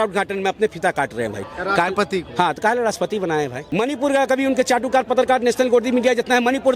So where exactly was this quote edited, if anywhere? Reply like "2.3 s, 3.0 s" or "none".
3.6 s